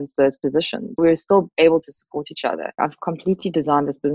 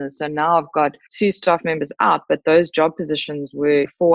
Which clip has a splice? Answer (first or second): first